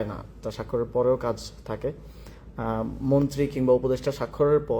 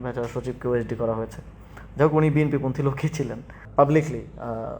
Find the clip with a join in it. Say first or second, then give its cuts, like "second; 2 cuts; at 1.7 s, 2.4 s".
second; 1 cut; at 3.5 s